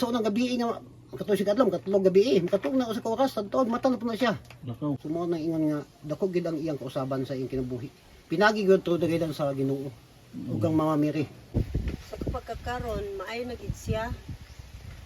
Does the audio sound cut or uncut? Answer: cut